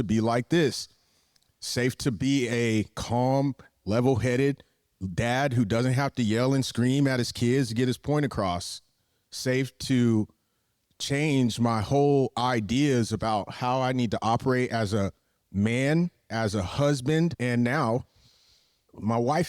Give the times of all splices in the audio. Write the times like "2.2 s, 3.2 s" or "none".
17.4 s